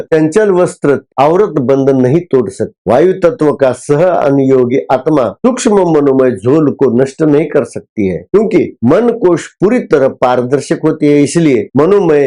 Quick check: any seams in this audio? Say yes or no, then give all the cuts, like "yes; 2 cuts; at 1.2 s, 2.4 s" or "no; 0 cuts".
yes; 1 cut; at 1.1 s